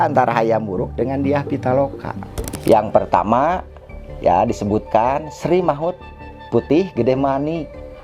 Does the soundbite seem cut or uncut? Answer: cut